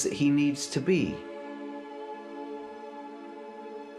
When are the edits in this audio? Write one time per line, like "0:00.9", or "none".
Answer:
none